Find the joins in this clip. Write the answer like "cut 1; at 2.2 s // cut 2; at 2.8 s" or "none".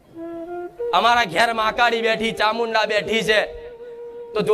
cut 1; at 0.9 s